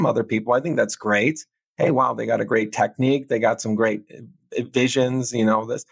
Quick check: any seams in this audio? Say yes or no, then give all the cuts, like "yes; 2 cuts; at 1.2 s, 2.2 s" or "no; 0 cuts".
no; 0 cuts